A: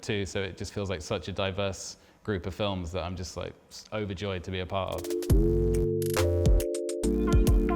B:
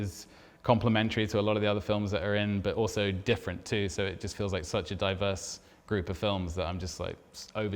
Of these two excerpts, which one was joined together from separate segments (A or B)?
A